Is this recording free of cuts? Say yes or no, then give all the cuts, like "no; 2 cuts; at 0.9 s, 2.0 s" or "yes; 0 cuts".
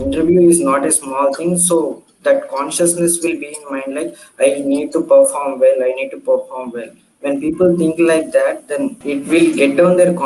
yes; 0 cuts